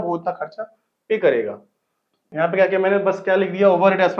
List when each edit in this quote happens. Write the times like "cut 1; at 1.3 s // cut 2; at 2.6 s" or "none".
cut 1; at 2.3 s